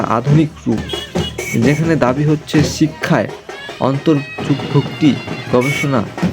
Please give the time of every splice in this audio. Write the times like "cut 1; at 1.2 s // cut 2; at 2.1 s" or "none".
none